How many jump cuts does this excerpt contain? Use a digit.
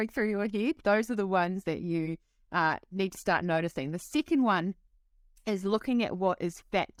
0